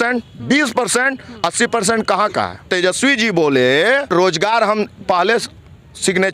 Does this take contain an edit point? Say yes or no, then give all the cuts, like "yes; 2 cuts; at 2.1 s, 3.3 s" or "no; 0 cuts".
yes; 2 cuts; at 2.7 s, 4.1 s